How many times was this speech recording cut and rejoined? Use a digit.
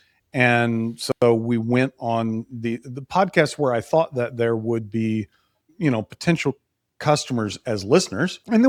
0